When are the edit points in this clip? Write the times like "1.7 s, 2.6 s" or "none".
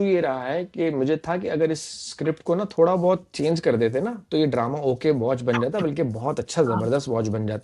none